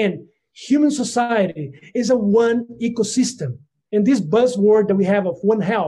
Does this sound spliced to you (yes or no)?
yes